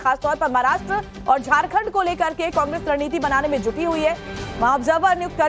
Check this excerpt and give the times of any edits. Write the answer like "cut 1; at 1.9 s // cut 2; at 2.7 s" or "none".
cut 1; at 2.1 s

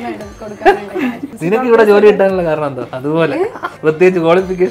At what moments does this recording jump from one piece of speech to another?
cut 1; at 1.3 s // cut 2; at 2.9 s // cut 3; at 3.7 s

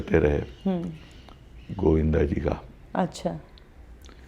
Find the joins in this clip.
none

